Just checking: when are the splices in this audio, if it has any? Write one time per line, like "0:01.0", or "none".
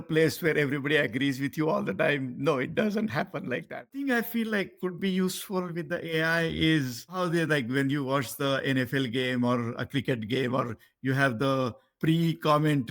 0:03.9
0:07.2
0:11.9